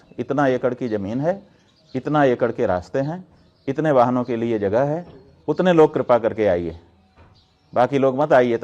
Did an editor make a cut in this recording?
no; 0 cuts

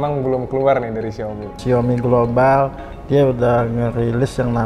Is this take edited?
yes; 1 cut; at 1.5 s

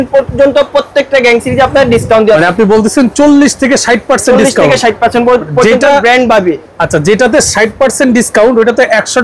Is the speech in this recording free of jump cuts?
yes; 0 cuts

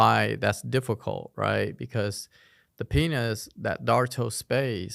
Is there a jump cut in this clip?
no; 0 cuts

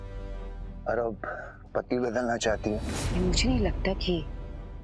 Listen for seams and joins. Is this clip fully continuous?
no; 1 cut; at 3.0 s

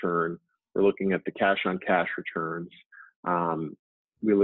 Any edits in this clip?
no; 0 cuts

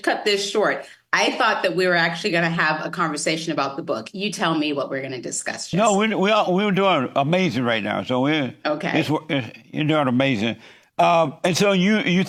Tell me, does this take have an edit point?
no; 0 cuts

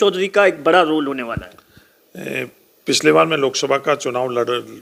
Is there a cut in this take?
no; 0 cuts

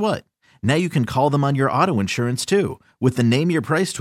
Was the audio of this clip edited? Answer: no; 0 cuts

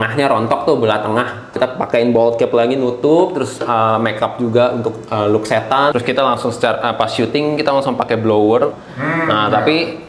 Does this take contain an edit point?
yes; 3 cuts; at 1.5 s, 5.9 s, 8.8 s

